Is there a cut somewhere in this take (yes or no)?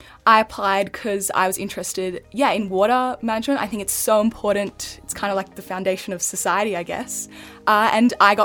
no